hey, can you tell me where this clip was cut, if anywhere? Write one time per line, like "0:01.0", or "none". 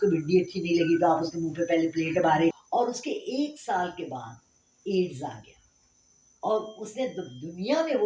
0:02.6

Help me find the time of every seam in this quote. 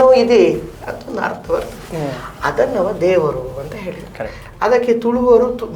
none

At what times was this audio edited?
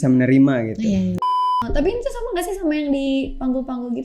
0:01.2

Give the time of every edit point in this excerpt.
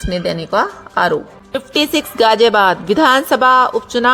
0:01.4

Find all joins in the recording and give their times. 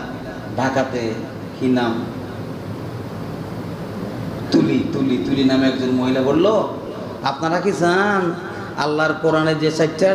none

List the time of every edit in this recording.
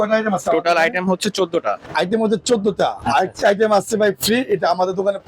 0:01.9

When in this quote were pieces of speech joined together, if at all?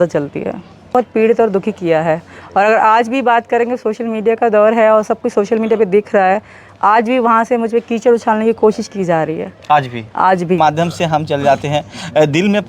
0:01.0
0:10.6

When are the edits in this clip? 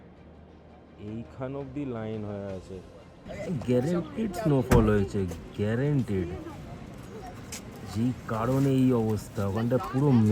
0:03.3

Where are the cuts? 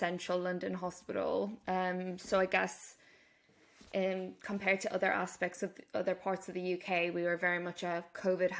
none

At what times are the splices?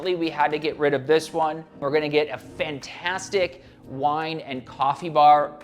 0:01.8

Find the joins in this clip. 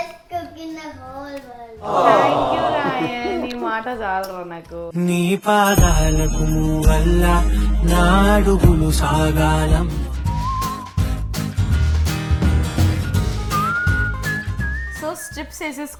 none

